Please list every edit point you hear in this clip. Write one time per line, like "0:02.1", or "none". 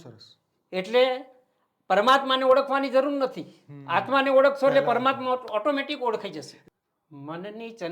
0:06.5